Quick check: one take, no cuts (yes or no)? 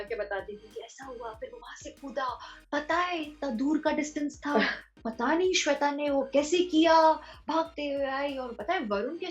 yes